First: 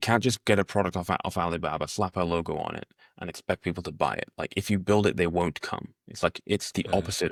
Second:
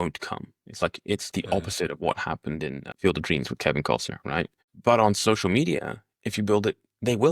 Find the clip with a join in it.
second; 2 cuts; at 2.8 s, 4.6 s

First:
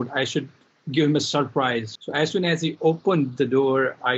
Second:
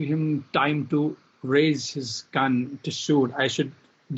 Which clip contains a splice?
first; 1 cut; at 1.9 s

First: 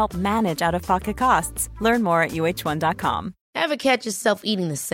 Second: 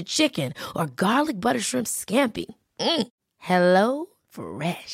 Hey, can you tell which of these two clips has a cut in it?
first; 1 cut; at 3.4 s

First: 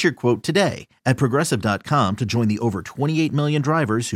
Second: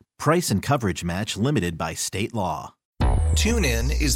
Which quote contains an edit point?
second; 1 cut; at 2.8 s

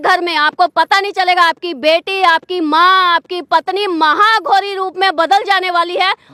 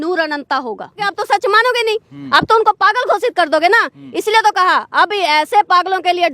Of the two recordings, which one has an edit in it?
second; 1 cut; at 1.1 s

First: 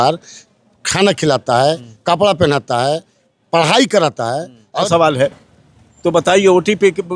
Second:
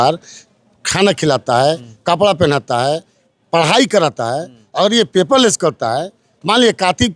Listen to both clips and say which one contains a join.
first; 1 cut; at 4.9 s

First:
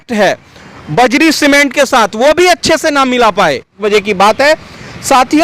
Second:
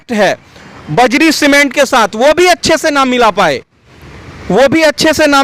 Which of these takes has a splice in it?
first; 1 cut; at 3.8 s

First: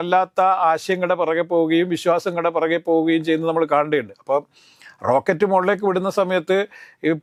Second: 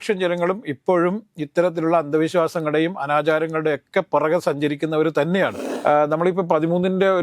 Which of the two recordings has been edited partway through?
second; 1 cut; at 5.7 s

